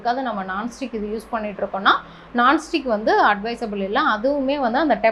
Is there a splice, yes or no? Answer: no